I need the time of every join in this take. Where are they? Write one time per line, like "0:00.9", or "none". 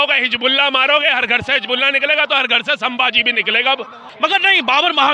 0:04.0